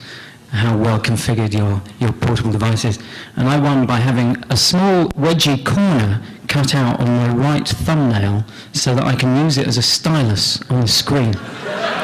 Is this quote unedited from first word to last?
no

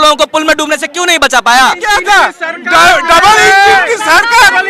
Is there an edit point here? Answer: yes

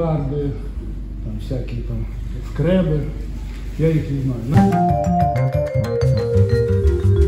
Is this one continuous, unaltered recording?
no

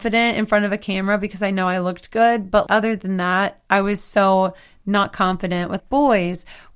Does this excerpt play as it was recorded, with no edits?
no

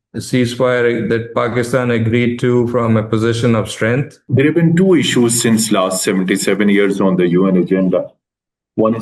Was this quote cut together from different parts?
yes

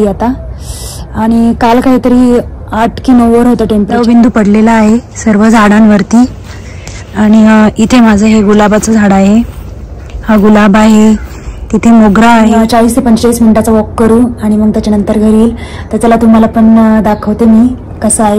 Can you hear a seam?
yes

